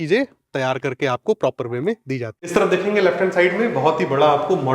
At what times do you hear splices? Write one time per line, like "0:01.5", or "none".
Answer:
0:02.5